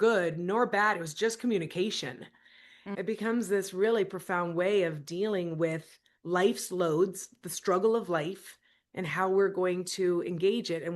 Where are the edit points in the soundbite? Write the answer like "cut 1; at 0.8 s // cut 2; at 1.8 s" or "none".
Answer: cut 1; at 2.8 s